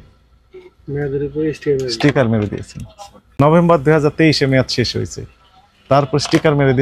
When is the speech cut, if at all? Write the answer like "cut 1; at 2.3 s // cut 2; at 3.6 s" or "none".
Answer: cut 1; at 3.3 s